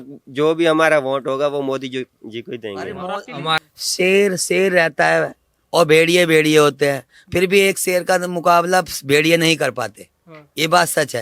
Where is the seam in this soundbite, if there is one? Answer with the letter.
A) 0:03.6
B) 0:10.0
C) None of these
A